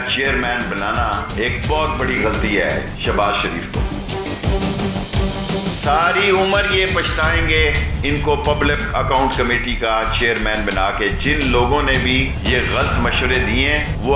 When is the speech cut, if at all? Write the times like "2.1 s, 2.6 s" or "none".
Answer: none